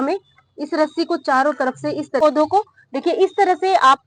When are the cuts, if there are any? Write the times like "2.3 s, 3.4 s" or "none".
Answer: 2.2 s